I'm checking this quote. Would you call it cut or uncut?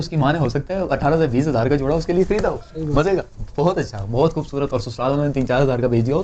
uncut